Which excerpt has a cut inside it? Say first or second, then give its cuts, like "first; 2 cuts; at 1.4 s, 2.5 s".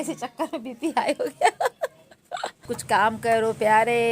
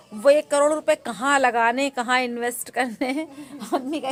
first; 1 cut; at 2.7 s